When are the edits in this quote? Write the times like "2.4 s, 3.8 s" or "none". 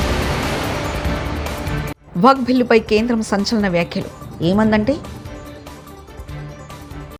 none

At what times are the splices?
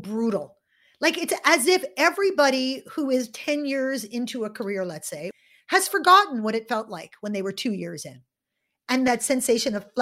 5.3 s, 9.1 s

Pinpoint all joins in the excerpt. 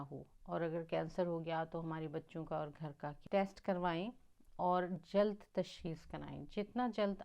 3.2 s

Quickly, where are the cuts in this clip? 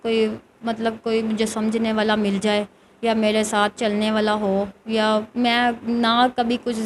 none

